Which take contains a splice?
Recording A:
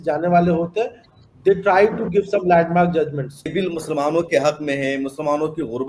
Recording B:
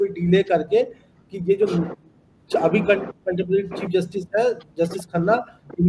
A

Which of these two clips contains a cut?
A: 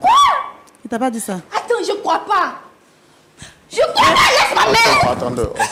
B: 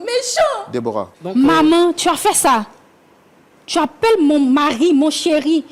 B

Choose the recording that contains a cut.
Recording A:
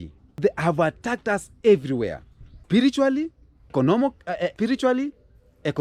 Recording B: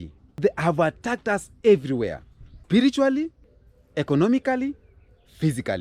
B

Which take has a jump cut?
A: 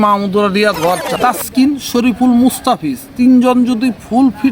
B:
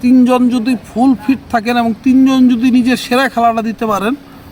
A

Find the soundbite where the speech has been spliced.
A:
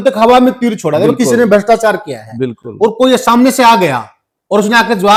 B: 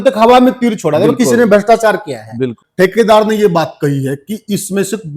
B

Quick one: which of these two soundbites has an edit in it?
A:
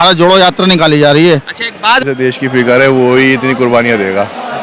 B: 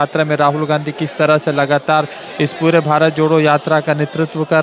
A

